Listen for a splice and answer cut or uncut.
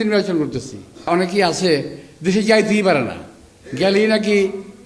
cut